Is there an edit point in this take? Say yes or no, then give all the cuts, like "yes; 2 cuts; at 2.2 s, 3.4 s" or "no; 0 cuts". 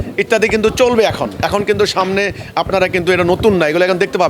no; 0 cuts